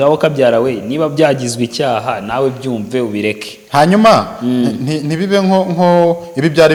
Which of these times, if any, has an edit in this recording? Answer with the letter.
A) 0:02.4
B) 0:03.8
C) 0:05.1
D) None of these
D